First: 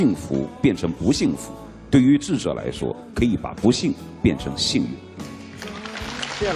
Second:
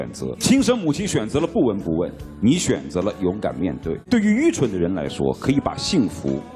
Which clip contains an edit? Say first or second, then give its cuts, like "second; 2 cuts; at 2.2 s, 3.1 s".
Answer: second; 1 cut; at 3.9 s